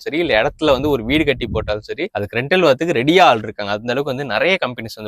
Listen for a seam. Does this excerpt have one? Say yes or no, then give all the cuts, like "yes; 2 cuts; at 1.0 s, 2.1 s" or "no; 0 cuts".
no; 0 cuts